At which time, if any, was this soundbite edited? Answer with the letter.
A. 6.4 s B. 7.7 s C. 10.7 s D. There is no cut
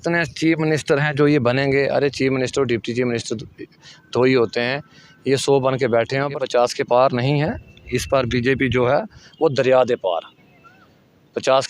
A